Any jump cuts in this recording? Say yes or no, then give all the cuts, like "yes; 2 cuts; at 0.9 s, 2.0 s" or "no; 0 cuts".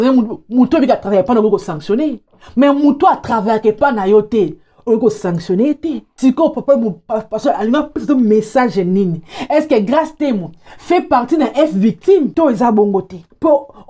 no; 0 cuts